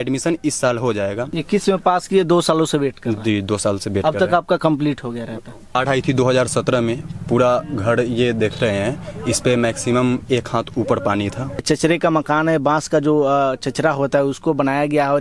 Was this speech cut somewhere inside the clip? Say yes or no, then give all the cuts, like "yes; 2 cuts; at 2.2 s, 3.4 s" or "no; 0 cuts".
yes; 3 cuts; at 1.3 s, 5.8 s, 11.6 s